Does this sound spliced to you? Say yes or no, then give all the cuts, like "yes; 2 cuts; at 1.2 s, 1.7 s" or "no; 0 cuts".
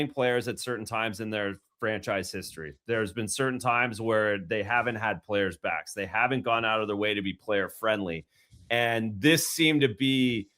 no; 0 cuts